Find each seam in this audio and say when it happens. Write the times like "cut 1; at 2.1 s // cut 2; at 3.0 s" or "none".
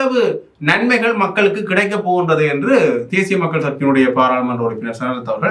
none